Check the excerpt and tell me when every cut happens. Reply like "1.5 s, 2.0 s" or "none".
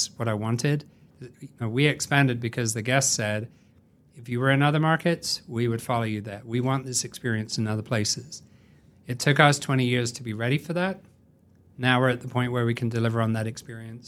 none